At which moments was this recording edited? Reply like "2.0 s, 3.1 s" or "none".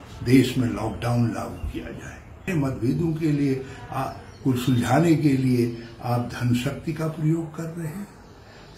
2.5 s